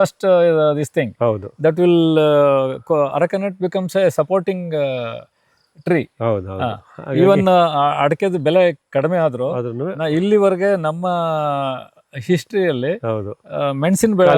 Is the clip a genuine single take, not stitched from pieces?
yes; 0 cuts

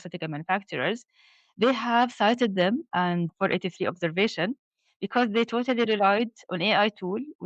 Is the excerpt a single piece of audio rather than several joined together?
yes; 0 cuts

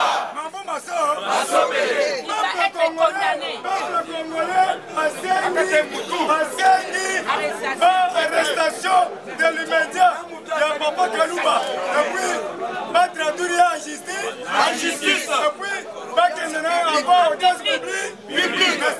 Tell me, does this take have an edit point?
no; 0 cuts

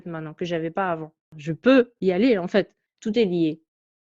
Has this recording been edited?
yes; 2 cuts; at 1.3 s, 2.8 s

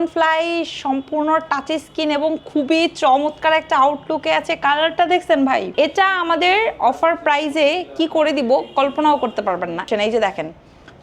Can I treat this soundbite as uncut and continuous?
no; 2 cuts; at 5.7 s, 9.9 s

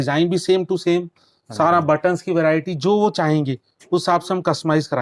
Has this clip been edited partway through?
no; 0 cuts

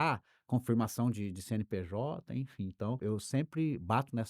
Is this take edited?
yes; 1 cut; at 3.0 s

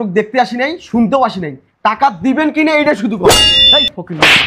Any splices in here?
yes; 1 cut; at 3.5 s

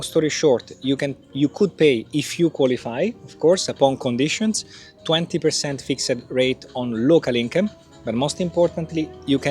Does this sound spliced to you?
no; 0 cuts

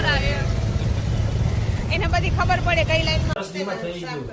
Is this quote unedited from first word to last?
no; 1 cut; at 3.4 s

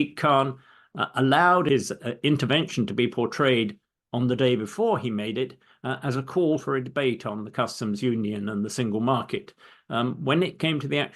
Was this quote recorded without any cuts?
no; 1 cut; at 1.7 s

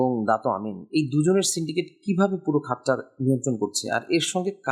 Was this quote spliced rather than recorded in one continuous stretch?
no; 0 cuts

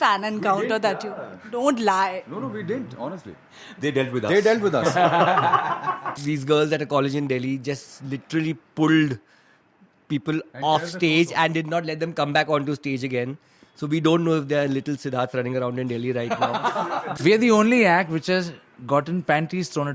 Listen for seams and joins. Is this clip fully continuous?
no; 2 cuts; at 6.1 s, 17.1 s

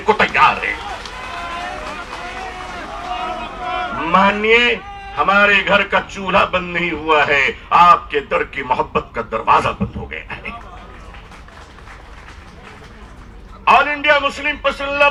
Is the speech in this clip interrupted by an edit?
no; 0 cuts

